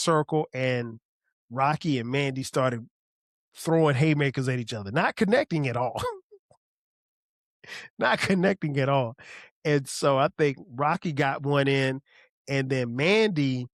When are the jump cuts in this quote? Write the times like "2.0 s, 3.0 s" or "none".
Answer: none